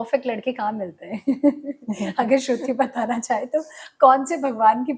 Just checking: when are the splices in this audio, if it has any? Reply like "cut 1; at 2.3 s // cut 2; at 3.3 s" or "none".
none